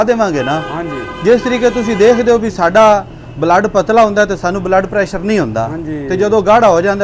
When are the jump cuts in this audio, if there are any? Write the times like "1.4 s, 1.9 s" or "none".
none

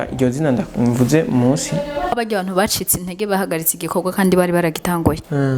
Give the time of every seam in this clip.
2.1 s

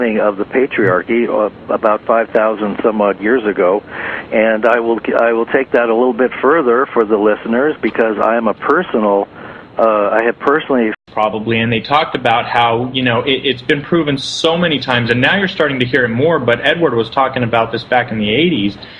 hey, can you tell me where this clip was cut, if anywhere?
none

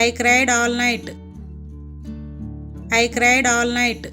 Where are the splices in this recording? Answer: 1.3 s, 2.9 s

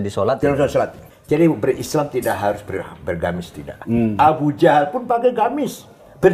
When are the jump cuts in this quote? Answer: 1.0 s

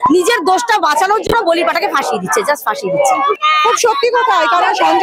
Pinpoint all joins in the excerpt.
3.4 s

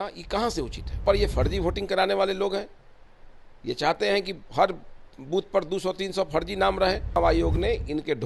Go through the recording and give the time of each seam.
1.0 s, 7.2 s

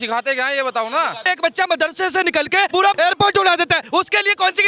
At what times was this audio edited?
1.2 s, 2.8 s

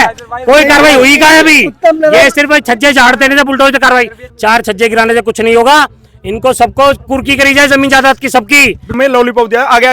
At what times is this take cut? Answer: 4.2 s, 8.9 s

